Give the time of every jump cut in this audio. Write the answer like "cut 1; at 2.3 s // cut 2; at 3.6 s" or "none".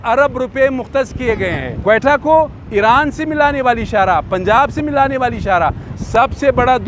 cut 1; at 1.7 s // cut 2; at 5.9 s